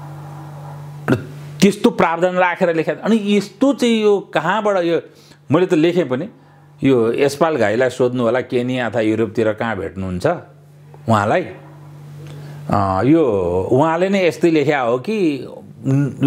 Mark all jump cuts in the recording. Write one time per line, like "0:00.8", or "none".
none